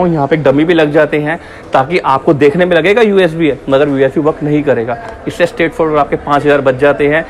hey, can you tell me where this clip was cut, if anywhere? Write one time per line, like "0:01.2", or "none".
none